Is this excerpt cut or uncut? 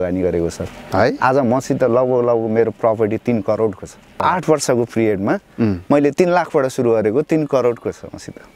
cut